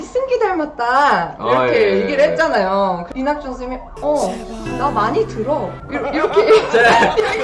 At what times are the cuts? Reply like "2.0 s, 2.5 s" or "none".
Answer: none